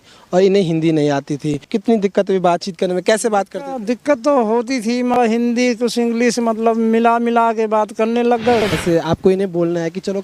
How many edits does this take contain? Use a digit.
3